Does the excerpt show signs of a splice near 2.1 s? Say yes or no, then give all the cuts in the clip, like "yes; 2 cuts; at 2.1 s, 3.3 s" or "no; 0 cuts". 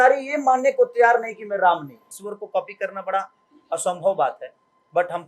yes; 1 cut; at 2.1 s